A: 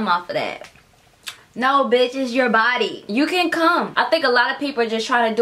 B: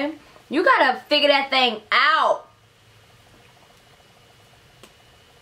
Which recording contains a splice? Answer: A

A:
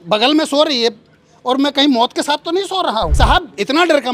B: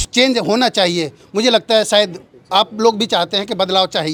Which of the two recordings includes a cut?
A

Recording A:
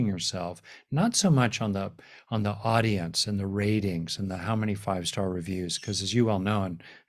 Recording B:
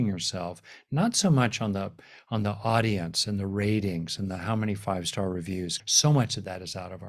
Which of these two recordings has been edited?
B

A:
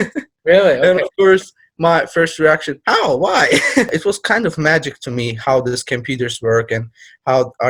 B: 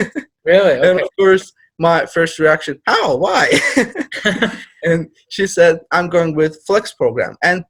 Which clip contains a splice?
A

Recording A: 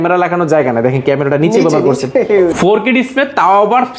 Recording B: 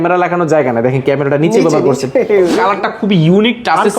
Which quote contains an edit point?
B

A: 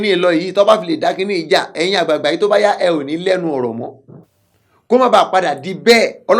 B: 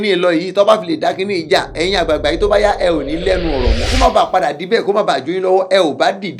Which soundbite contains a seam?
B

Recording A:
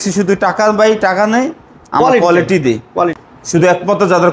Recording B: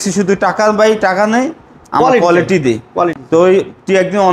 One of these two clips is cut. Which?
A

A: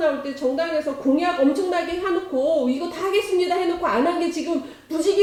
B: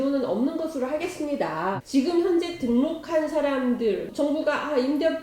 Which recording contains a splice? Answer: B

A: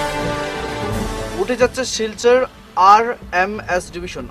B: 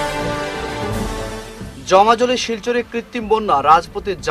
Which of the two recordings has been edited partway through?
A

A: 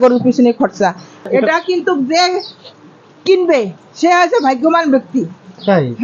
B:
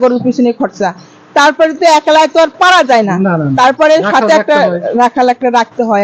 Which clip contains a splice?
A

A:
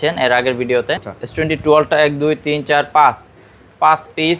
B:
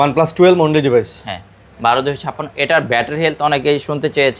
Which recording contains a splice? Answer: A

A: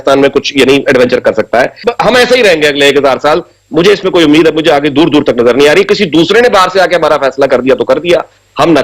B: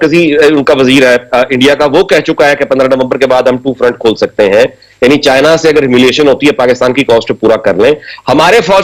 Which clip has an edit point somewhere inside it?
A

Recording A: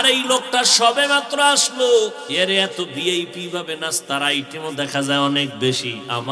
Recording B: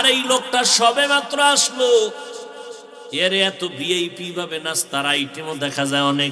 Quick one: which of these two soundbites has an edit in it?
A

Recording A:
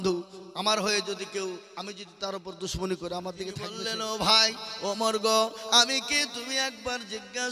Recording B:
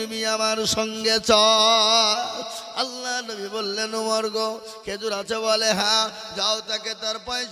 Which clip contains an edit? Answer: A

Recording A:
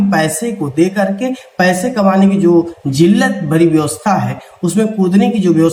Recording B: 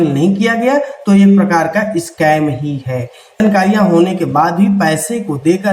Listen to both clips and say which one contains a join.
B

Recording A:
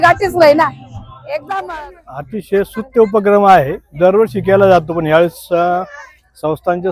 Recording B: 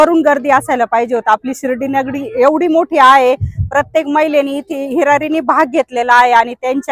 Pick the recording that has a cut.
A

